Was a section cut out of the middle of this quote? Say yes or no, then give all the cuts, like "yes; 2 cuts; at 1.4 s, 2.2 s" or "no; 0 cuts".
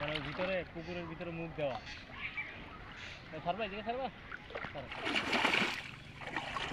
yes; 1 cut; at 4.9 s